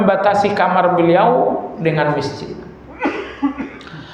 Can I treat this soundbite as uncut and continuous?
yes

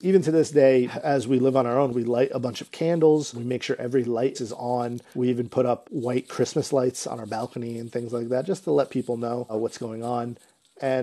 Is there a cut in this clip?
yes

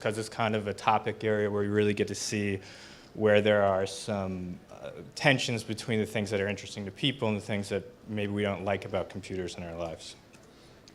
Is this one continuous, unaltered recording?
no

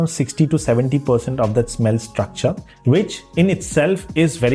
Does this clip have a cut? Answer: no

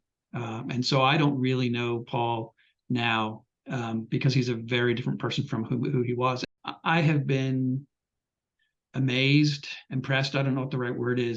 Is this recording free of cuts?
no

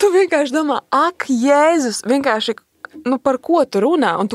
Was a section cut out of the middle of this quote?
no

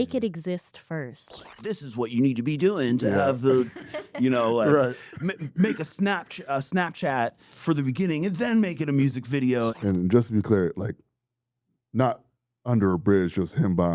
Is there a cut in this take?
yes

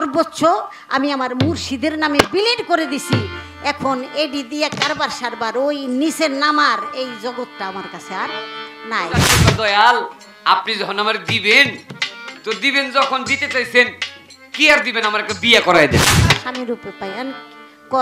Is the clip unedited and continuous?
no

